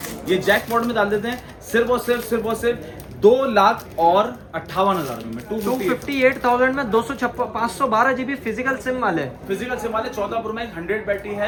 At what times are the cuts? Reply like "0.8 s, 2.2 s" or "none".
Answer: none